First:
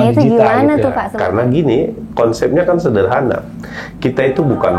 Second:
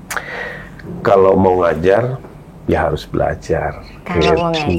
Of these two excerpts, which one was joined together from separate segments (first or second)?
first